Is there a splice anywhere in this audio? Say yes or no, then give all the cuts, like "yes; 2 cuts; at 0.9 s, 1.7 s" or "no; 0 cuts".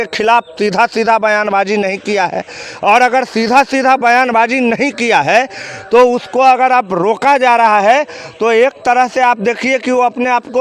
no; 0 cuts